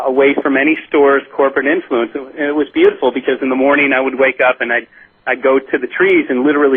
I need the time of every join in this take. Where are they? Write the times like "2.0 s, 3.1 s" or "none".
2.8 s